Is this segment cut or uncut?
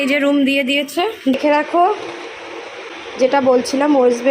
cut